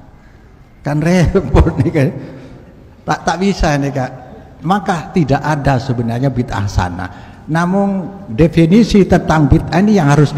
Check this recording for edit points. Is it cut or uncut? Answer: uncut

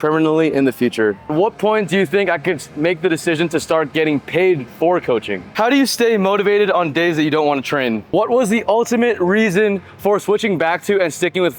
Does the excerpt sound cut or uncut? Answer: cut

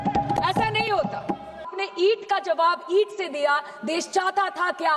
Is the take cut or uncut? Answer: cut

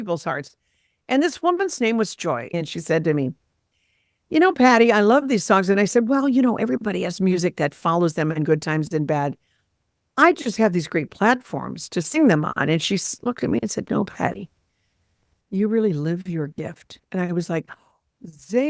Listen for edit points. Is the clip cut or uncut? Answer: cut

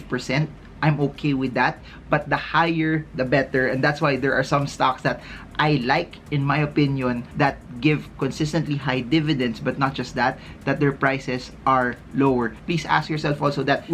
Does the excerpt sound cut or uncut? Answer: uncut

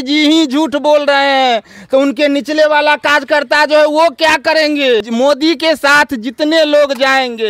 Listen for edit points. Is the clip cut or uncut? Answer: cut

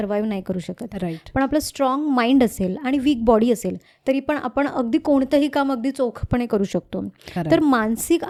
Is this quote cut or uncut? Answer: uncut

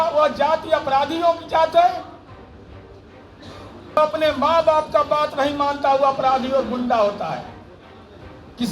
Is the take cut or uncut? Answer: cut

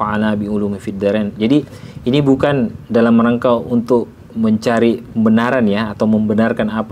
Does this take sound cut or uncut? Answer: uncut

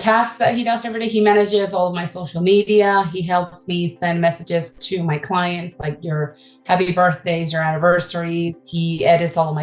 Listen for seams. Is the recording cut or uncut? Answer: uncut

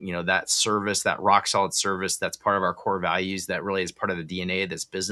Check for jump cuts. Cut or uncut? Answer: uncut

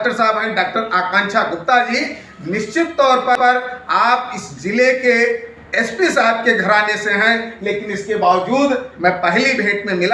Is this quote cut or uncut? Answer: cut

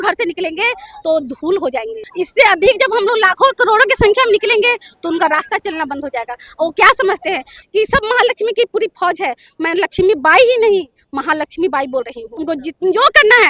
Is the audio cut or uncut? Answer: cut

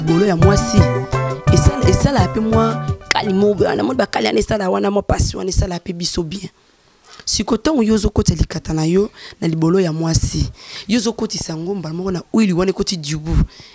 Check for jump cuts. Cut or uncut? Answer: uncut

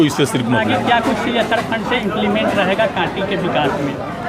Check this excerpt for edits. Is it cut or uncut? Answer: uncut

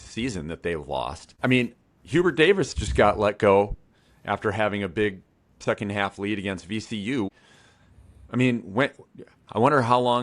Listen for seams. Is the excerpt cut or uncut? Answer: cut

